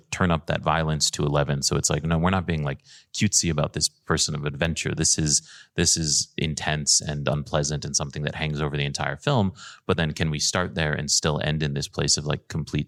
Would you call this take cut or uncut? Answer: uncut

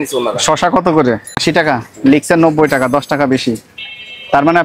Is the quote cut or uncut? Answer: cut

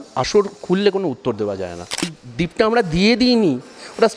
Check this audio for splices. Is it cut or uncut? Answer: cut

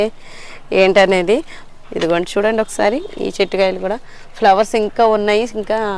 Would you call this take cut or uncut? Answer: cut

